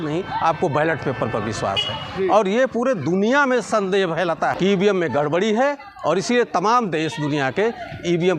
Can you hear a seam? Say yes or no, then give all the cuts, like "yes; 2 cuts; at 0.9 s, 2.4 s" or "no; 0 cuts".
yes; 1 cut; at 4.5 s